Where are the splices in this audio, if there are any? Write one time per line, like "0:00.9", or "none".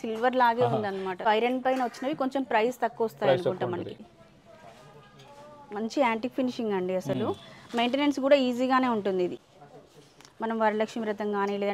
0:01.2
0:04.1
0:09.4